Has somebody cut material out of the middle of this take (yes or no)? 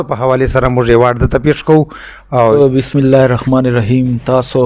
yes